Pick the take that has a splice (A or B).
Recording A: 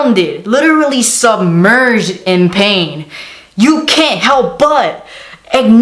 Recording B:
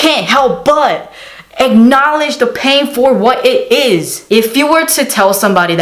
B